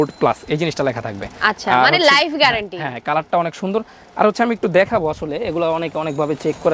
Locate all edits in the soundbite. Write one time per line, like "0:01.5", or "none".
none